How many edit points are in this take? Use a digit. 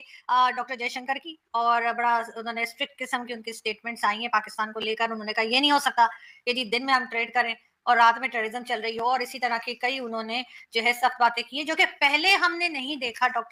0